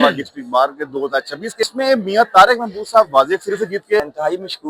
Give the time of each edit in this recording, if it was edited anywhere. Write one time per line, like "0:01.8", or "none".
0:01.7
0:04.0

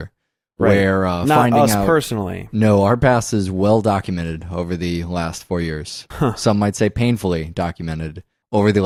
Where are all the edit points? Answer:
none

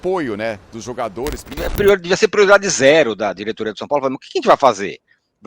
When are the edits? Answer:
0:01.5

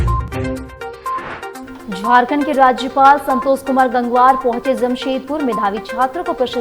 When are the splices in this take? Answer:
0:01.7

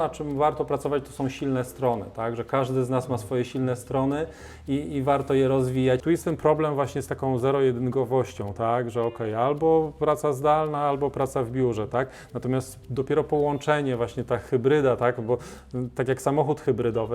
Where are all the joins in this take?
0:06.0

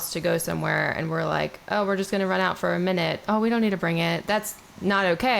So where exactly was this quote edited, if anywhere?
0:04.2

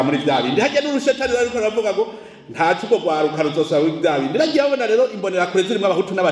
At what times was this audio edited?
none

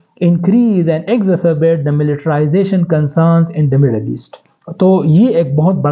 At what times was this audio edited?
none

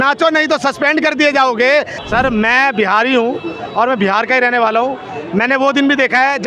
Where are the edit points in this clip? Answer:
0:02.0

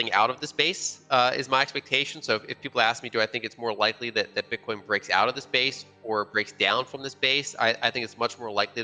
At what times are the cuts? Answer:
none

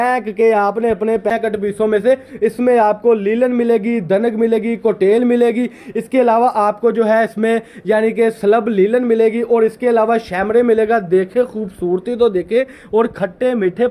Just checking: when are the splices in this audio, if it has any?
0:01.3

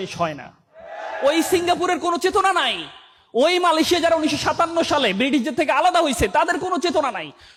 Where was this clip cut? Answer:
none

